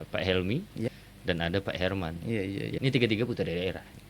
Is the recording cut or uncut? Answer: cut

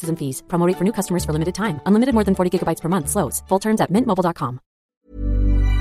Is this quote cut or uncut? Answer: cut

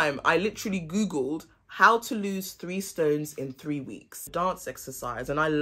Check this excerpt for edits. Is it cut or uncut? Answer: cut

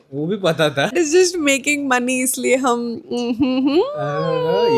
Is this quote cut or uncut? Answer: cut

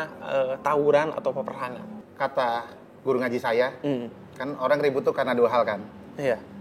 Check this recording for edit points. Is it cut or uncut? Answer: cut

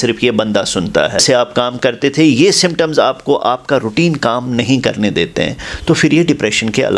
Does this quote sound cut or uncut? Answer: cut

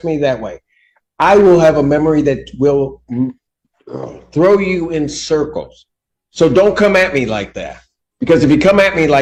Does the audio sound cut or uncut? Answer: uncut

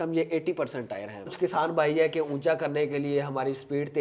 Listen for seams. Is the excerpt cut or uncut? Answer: cut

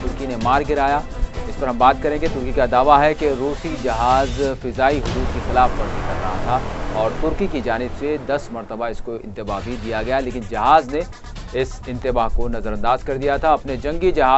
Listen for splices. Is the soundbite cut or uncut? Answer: cut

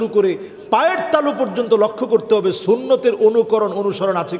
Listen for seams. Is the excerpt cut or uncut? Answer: uncut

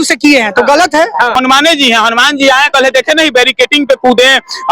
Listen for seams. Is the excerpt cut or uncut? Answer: cut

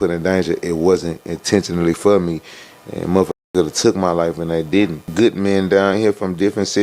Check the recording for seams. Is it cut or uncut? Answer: cut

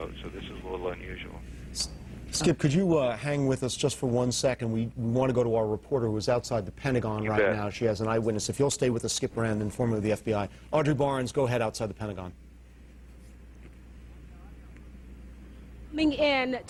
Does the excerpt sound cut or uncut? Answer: uncut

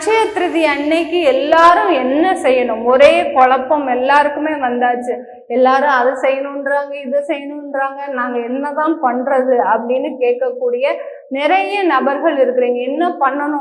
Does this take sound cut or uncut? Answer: uncut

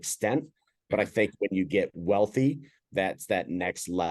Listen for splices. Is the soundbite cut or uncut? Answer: cut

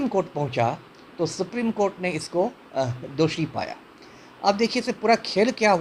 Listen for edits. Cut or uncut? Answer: uncut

